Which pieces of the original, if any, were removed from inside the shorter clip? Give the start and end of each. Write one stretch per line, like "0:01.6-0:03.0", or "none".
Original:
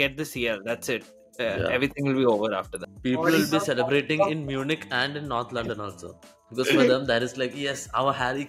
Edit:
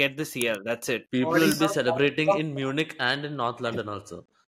0:01.0-0:03.0